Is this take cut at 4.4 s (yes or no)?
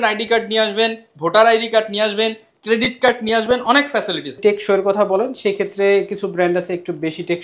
yes